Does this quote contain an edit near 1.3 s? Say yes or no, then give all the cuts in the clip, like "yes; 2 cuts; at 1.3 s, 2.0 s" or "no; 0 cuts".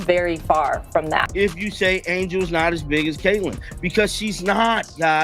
yes; 1 cut; at 1.3 s